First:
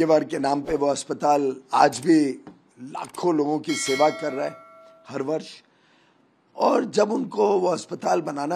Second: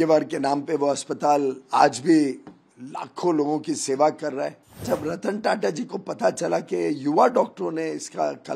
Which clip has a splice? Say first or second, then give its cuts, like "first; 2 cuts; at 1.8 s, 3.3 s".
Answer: second; 1 cut; at 4.8 s